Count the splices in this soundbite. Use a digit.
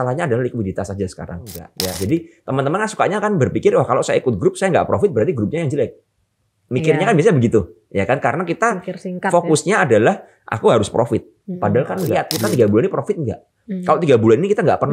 2